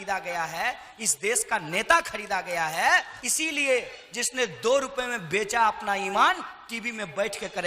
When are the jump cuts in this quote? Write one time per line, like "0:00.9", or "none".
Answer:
0:03.2